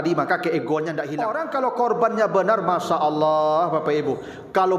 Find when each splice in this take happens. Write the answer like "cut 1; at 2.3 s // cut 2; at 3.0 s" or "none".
cut 1; at 1.2 s

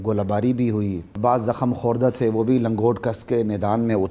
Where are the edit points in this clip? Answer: cut 1; at 1.1 s

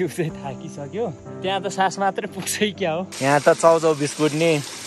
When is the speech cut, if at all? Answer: cut 1; at 1.3 s // cut 2; at 3.1 s

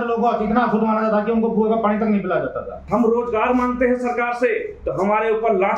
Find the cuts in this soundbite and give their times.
cut 1; at 2.7 s

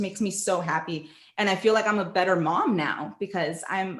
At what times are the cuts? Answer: none

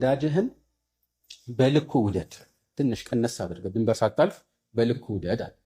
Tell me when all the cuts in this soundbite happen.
none

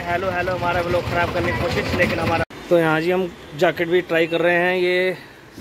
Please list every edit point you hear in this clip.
cut 1; at 2.4 s

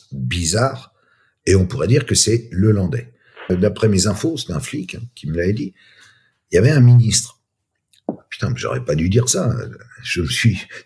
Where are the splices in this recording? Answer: cut 1; at 3.5 s

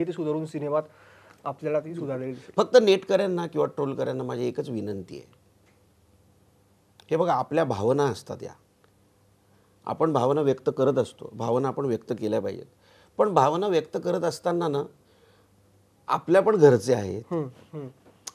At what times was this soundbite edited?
none

